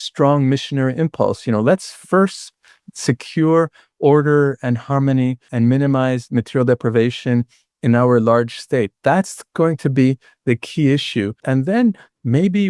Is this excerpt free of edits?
no; 2 cuts; at 5.5 s, 11.4 s

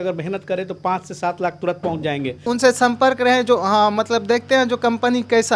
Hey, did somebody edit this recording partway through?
yes; 1 cut; at 2.5 s

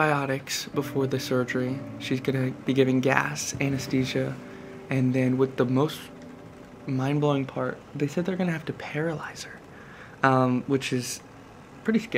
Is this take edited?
no; 0 cuts

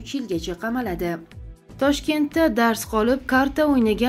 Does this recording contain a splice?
yes; 1 cut; at 1.4 s

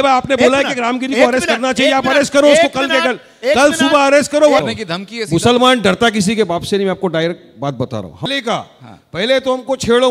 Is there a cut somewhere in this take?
yes; 2 cuts; at 4.6 s, 8.3 s

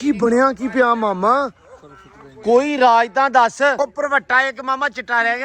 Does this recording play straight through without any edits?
no; 1 cut; at 3.8 s

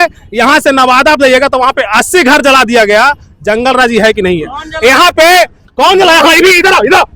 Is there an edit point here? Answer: no; 0 cuts

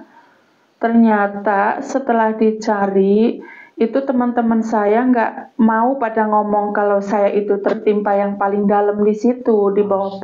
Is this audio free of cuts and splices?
yes; 0 cuts

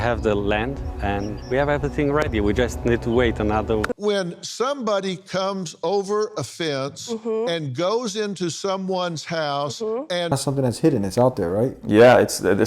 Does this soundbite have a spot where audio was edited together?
yes; 2 cuts; at 3.9 s, 10.3 s

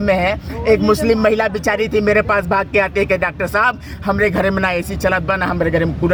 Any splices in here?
no; 0 cuts

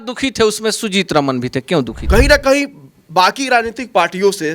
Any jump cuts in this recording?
yes; 1 cut; at 2.0 s

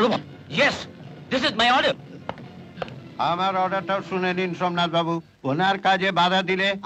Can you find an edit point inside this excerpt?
yes; 1 cut; at 5.3 s

